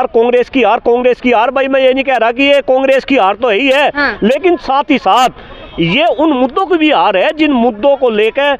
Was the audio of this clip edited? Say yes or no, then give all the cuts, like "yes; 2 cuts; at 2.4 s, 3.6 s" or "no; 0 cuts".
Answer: no; 0 cuts